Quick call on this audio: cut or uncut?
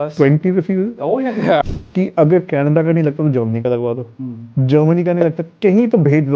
cut